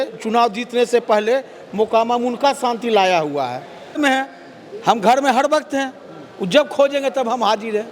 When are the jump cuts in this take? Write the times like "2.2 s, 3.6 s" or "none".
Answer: 4.0 s